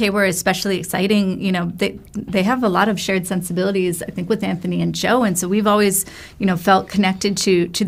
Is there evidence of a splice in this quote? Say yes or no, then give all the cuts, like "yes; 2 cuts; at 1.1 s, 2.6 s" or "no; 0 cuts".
no; 0 cuts